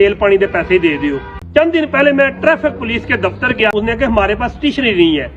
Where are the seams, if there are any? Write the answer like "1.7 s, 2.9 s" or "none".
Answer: 1.3 s, 3.7 s